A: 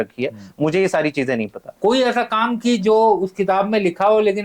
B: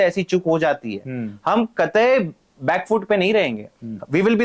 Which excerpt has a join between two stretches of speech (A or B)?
A